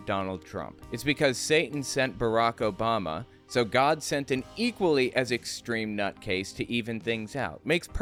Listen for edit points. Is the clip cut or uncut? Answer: uncut